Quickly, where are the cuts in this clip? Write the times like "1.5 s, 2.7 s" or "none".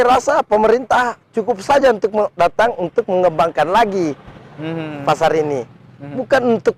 none